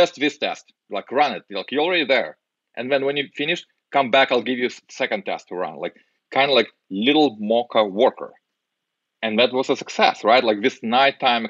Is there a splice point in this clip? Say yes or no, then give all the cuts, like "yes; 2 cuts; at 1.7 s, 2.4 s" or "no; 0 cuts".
no; 0 cuts